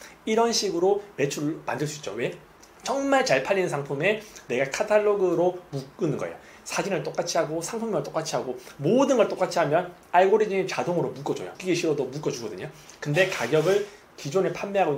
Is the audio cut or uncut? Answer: cut